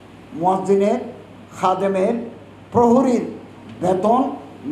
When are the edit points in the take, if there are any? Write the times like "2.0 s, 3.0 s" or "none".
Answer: none